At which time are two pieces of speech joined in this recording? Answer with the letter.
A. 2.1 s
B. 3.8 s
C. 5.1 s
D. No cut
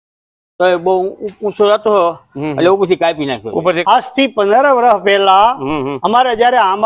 B